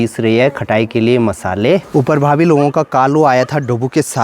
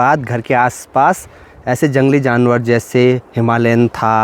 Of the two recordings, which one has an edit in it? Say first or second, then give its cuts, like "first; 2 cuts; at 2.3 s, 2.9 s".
first; 1 cut; at 1.9 s